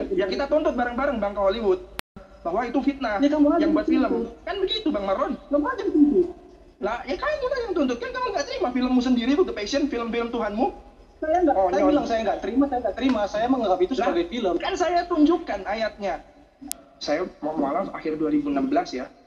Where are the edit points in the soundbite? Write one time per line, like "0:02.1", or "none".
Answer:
0:02.3
0:08.2
0:16.7